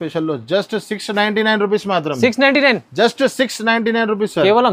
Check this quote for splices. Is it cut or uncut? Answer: uncut